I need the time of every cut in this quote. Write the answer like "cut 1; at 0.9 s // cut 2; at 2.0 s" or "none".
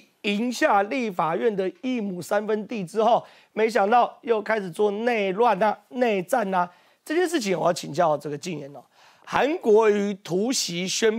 none